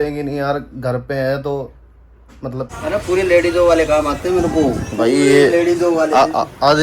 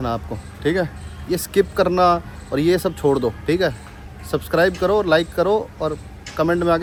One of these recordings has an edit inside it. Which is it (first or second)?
first